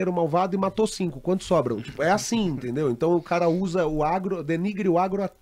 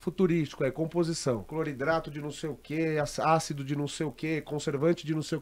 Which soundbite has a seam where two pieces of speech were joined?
second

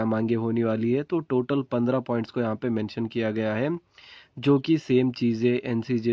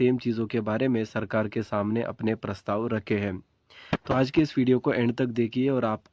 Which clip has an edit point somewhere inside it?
first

